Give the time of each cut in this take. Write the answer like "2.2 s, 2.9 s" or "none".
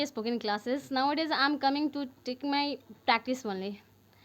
none